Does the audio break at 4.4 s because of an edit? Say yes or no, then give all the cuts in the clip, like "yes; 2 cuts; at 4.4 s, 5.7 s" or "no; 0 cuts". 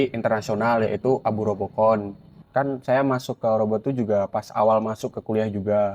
no; 1 cut; at 2.4 s